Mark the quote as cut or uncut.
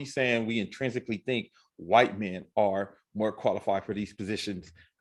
uncut